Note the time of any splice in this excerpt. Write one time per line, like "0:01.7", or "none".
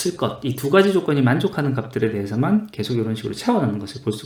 none